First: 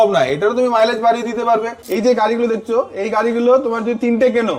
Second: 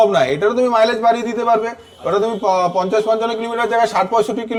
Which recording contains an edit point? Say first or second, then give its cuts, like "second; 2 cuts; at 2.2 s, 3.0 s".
first; 1 cut; at 1.8 s